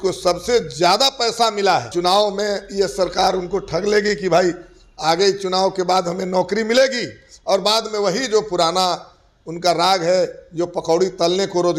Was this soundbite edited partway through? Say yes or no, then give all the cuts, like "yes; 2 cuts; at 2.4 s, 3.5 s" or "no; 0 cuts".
yes; 1 cut; at 1.9 s